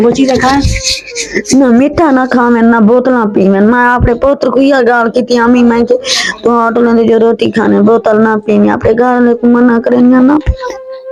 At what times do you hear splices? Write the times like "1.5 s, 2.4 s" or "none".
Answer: none